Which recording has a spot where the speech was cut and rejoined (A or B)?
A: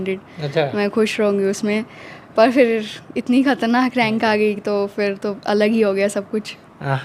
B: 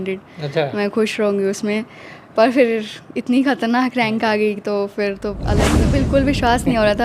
B